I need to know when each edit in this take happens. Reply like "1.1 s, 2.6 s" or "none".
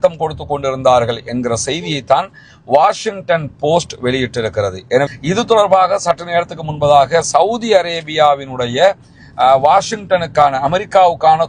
5.1 s